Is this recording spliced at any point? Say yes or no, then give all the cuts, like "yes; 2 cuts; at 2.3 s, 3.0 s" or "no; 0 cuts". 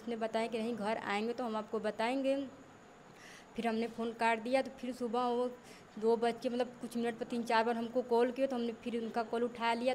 no; 0 cuts